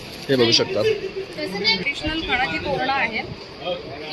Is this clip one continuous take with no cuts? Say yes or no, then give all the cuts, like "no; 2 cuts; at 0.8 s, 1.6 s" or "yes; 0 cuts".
no; 1 cut; at 1.8 s